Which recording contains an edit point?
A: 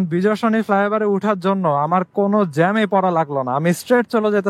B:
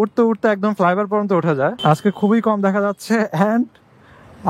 B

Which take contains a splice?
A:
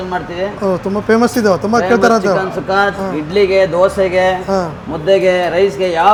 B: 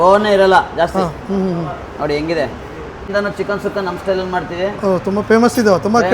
B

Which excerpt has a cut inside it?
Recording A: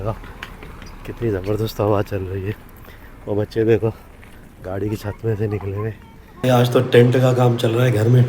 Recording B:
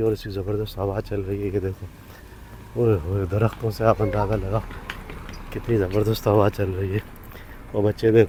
A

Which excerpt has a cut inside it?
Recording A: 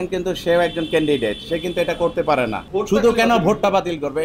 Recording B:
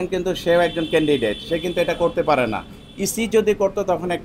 A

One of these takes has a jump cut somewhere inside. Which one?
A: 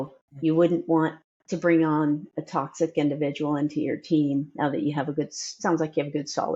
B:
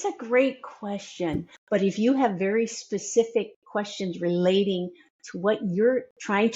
B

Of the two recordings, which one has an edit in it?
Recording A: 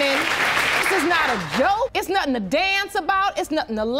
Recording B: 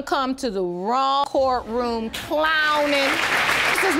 B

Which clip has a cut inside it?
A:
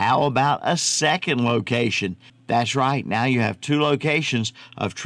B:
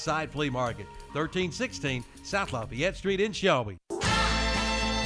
B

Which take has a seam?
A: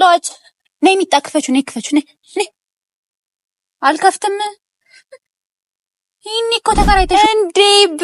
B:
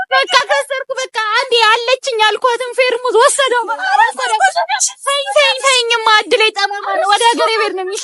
A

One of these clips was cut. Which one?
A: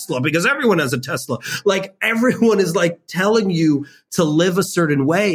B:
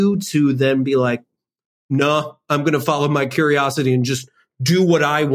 B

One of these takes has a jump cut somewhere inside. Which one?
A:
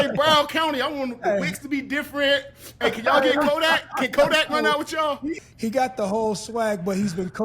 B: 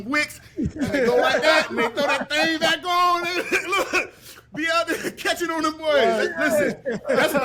A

